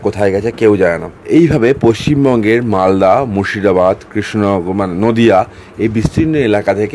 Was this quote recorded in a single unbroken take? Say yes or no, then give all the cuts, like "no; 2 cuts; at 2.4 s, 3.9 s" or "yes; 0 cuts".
no; 1 cut; at 1.1 s